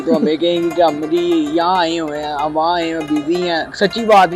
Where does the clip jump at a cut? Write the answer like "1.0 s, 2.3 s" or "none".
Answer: none

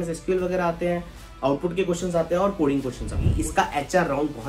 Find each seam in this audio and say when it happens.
3.3 s

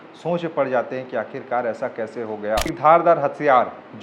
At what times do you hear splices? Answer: 2.7 s

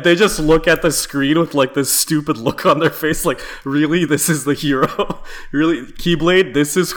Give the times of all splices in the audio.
none

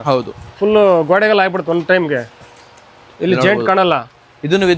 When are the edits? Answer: none

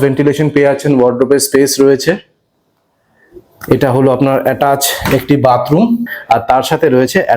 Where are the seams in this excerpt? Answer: 6.1 s

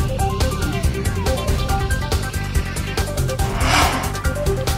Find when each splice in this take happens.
none

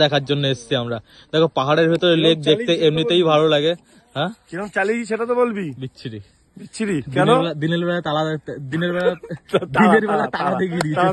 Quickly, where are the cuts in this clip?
none

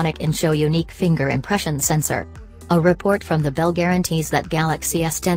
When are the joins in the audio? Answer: none

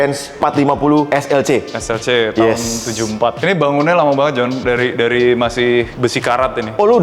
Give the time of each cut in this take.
none

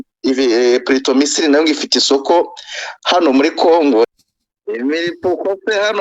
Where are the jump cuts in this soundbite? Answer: 4.1 s

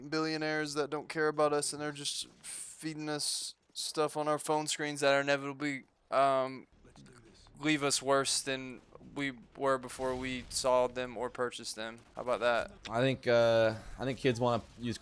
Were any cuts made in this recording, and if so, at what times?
12.8 s

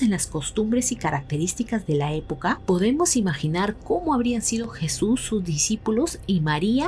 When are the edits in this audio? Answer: none

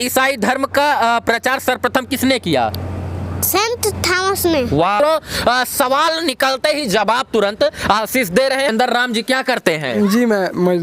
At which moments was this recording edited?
5.0 s, 8.7 s

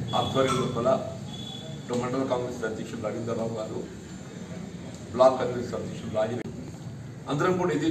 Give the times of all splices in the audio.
6.4 s

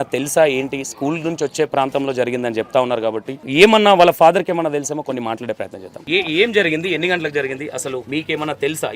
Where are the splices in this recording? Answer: 3.4 s, 5.9 s, 8.1 s

